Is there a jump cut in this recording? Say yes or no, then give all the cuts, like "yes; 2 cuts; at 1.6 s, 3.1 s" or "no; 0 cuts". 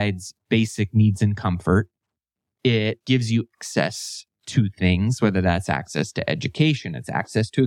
yes; 1 cut; at 3.3 s